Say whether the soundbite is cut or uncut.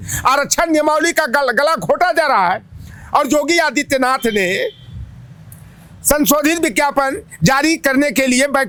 uncut